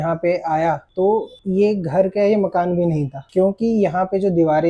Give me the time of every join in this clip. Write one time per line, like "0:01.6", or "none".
0:01.1